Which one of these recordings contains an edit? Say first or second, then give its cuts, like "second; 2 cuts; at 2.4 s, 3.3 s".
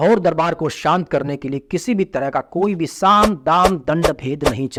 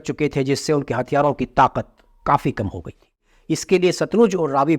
second; 1 cut; at 3.2 s